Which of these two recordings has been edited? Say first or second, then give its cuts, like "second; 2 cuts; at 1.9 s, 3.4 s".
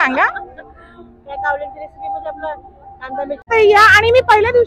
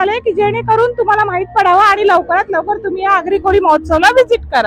first; 1 cut; at 3.5 s